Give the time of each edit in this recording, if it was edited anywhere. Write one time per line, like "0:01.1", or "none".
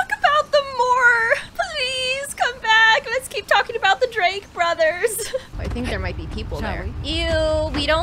0:01.5
0:05.5
0:06.9